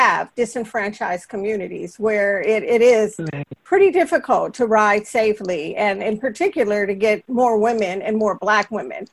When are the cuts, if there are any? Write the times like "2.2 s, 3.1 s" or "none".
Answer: none